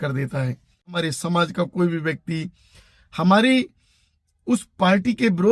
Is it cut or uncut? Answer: cut